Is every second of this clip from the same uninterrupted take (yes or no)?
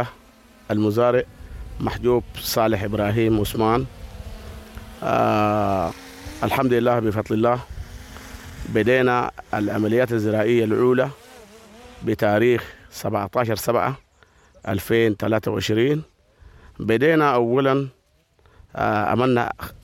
yes